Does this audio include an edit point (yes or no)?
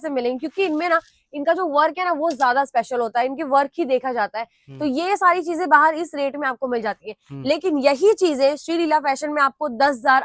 no